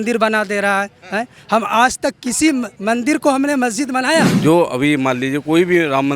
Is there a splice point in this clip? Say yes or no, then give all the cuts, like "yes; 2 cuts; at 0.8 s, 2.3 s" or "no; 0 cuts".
yes; 1 cut; at 4.3 s